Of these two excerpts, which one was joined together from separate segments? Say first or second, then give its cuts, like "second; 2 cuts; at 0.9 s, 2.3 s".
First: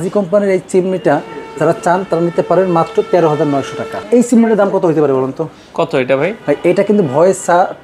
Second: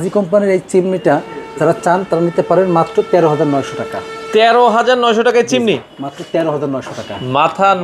first; 1 cut; at 4.0 s